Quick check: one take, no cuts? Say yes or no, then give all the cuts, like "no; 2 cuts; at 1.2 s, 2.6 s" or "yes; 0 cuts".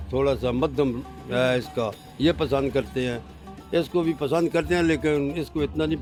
yes; 0 cuts